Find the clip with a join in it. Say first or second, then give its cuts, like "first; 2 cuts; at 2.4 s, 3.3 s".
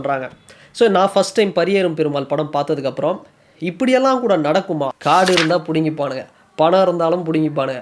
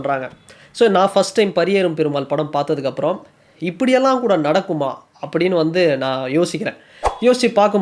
first; 1 cut; at 4.9 s